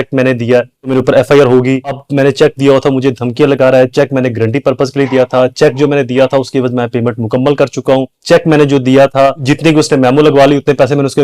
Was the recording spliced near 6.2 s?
no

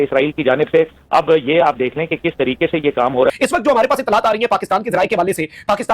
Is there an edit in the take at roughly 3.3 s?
yes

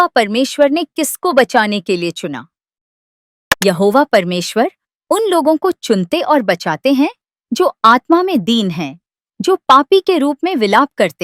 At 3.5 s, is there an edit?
yes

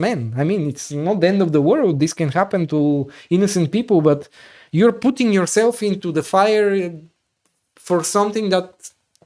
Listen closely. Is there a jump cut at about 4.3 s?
no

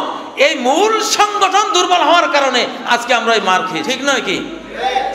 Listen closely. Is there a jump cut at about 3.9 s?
yes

